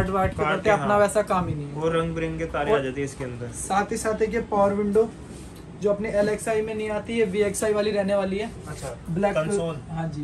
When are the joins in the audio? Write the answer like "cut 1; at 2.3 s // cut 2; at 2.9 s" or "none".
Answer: none